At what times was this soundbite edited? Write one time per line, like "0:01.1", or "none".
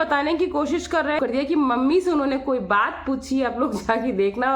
0:01.2